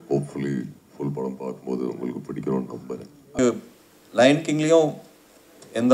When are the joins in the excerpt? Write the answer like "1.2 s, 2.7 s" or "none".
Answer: 3.3 s

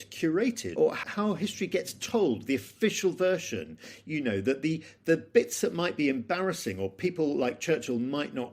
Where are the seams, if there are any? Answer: 0.9 s

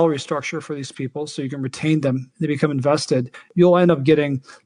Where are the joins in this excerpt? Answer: 3.5 s

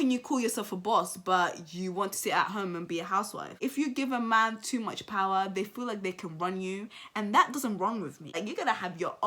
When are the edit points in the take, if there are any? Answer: 3.5 s, 8.3 s

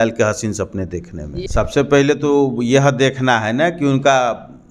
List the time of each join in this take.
1.3 s

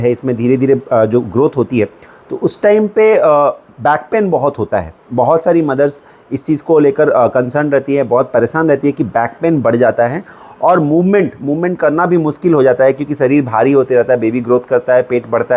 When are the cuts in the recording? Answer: none

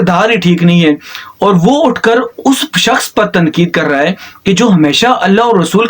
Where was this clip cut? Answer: none

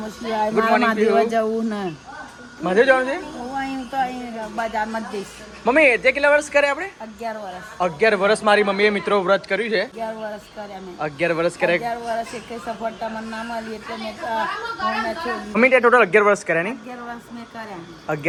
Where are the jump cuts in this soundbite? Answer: none

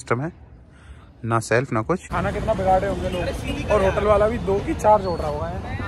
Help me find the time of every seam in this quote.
2.1 s

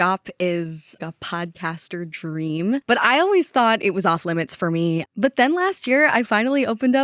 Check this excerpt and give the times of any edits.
1.0 s, 5.1 s

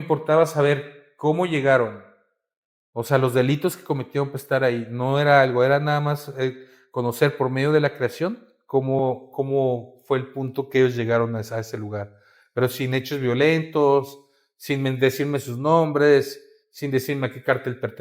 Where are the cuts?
none

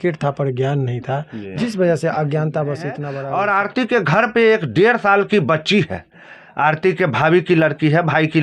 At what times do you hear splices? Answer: 3.1 s

